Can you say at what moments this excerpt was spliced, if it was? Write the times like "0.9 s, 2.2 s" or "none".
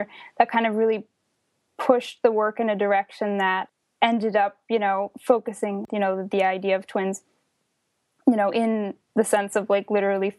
3.7 s, 5.9 s

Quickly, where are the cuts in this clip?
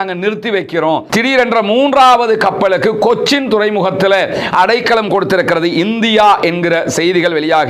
1.1 s

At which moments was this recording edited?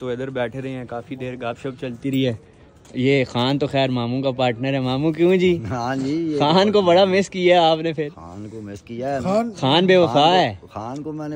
none

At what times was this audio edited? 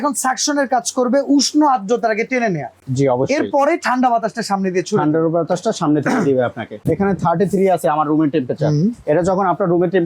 6.7 s

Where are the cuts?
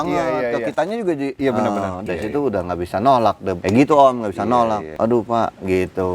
1.3 s, 2.0 s, 3.5 s, 4.9 s

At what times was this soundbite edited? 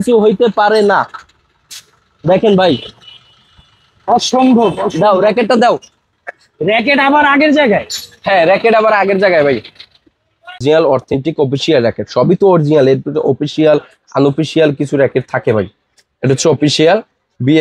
10.6 s

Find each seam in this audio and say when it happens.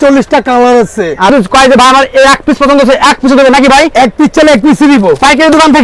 1.3 s

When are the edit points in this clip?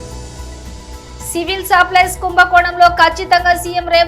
1.0 s

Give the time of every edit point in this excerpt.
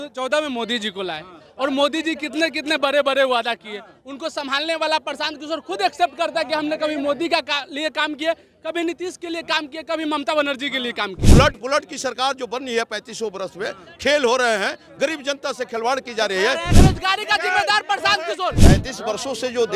11.2 s, 16.7 s, 18.6 s

